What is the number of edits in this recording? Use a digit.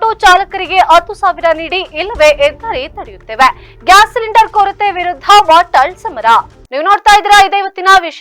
0